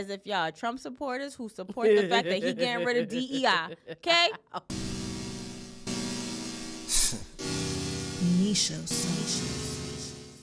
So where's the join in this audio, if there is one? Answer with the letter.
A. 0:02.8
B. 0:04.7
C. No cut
B